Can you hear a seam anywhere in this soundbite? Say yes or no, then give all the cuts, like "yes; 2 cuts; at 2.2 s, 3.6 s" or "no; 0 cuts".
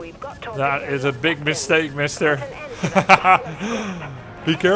no; 0 cuts